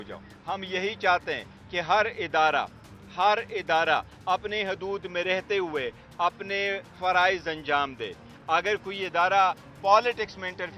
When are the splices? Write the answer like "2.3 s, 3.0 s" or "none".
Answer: none